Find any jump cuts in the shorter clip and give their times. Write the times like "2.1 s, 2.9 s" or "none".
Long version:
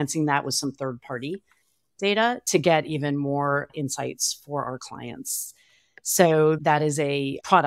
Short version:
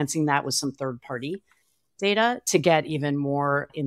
none